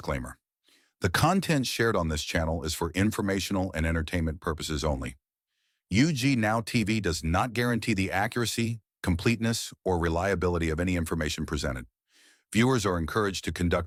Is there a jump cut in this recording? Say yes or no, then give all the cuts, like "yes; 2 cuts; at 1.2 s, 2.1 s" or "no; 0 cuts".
no; 0 cuts